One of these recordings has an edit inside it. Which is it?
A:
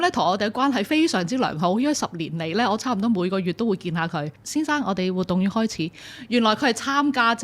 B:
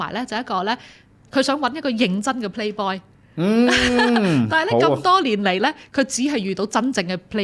A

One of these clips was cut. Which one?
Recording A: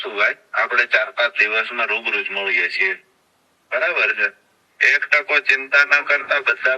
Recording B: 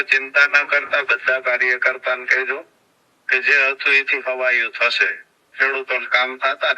B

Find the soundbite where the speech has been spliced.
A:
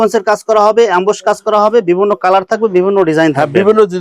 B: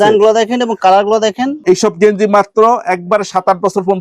B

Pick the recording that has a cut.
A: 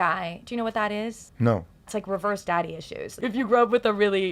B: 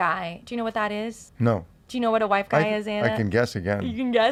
A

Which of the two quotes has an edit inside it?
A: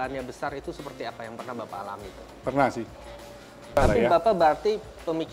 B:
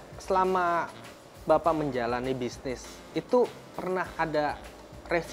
A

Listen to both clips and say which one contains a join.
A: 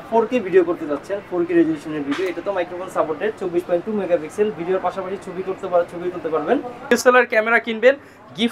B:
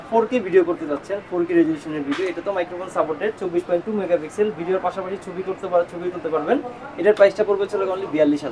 A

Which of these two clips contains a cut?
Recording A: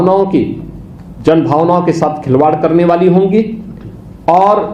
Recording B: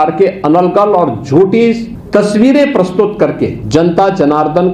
B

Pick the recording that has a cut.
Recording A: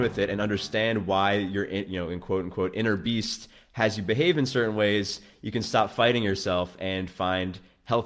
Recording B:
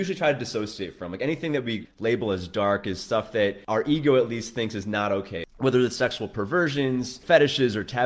B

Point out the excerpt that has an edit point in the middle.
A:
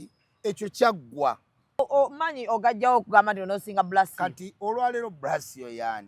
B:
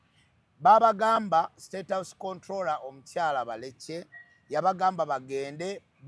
A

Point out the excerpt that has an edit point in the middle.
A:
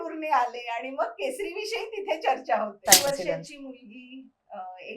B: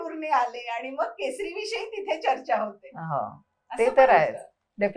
A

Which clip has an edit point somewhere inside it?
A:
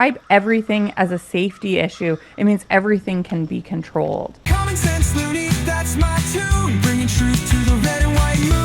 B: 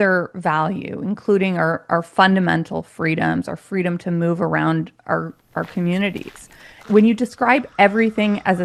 A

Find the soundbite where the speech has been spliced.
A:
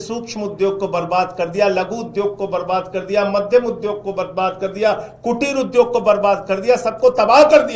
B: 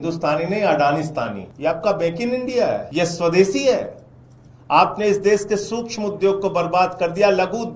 B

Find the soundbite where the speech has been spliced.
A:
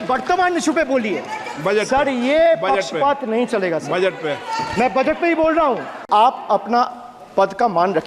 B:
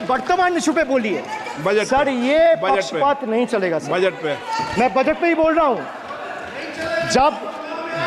A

